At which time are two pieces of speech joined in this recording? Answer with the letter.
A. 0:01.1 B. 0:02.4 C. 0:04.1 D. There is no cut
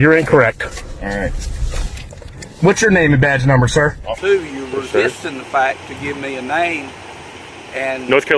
C